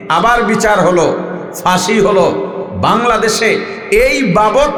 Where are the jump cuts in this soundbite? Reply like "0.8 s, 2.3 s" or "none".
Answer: none